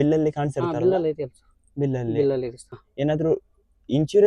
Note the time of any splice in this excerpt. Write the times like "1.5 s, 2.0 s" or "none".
2.8 s